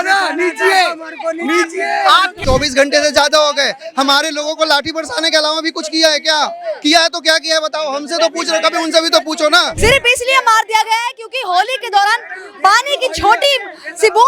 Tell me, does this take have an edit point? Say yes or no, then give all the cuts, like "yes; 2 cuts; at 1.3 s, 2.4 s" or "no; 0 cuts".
yes; 2 cuts; at 2.4 s, 9.7 s